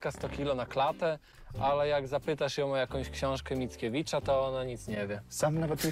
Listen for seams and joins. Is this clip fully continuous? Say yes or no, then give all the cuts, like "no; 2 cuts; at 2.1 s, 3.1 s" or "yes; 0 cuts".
yes; 0 cuts